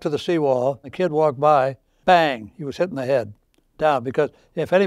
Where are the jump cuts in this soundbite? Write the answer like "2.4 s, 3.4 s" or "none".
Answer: 0.9 s, 1.9 s

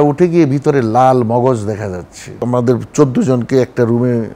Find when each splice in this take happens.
2.4 s

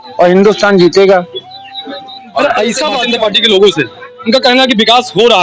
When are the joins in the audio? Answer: 3.0 s

